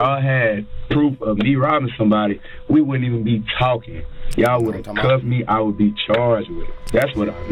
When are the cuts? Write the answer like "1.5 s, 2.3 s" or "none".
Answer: 6.4 s